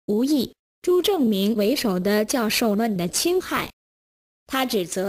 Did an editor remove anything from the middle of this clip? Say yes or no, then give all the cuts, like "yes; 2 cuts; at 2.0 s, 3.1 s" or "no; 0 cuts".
yes; 1 cut; at 1.6 s